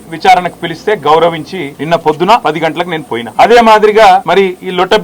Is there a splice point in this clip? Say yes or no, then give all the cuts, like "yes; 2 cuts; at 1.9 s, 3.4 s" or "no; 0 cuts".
no; 0 cuts